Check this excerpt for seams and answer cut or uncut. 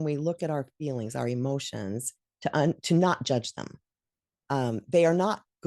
uncut